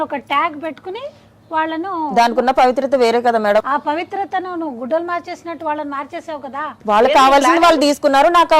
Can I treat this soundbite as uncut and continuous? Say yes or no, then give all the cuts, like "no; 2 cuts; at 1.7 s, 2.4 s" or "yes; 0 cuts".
no; 2 cuts; at 3.6 s, 6.7 s